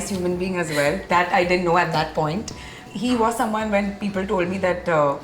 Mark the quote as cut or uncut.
uncut